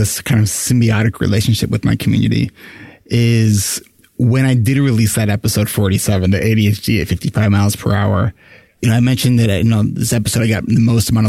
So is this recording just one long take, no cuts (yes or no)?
no